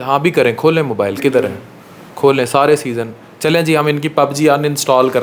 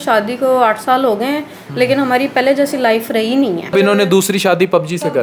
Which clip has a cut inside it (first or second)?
second